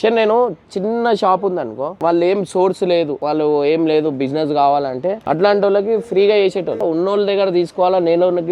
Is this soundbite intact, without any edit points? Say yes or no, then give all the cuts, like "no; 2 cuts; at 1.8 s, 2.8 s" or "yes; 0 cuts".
no; 4 cuts; at 2.0 s, 3.2 s, 5.2 s, 6.8 s